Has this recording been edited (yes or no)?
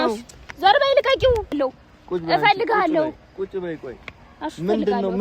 yes